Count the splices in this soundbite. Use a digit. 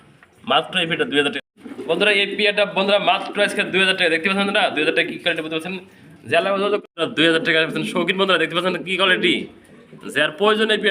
2